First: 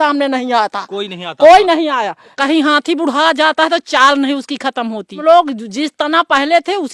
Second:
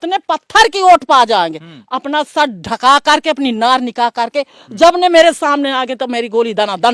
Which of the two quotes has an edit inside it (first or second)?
first